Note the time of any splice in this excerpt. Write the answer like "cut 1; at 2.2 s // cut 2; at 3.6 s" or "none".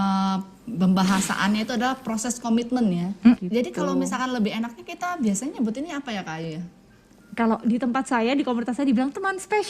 cut 1; at 3.4 s